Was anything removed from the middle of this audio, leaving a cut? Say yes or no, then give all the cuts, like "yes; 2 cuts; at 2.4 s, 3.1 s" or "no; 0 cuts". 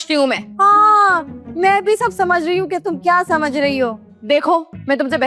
no; 0 cuts